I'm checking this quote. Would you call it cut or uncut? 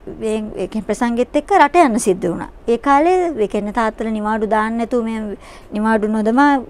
cut